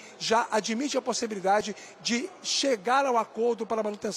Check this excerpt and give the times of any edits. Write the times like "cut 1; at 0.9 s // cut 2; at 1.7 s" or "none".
none